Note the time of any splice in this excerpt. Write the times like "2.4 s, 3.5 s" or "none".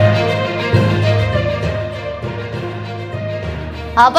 2.0 s